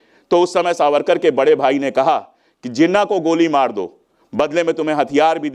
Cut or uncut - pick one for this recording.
uncut